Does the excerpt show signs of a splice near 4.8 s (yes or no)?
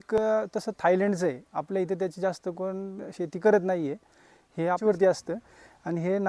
yes